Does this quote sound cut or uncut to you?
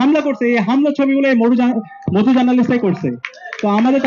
uncut